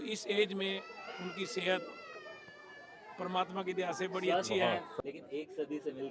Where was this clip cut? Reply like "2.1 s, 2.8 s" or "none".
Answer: 4.9 s